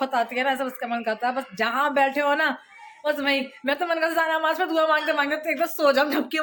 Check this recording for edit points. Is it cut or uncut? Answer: uncut